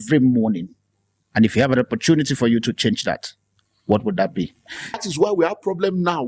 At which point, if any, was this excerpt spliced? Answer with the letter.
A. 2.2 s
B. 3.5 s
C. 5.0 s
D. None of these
C